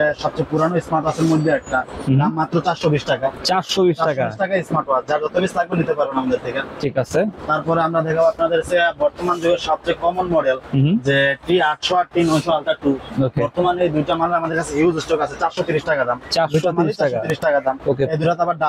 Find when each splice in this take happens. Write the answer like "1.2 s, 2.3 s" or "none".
none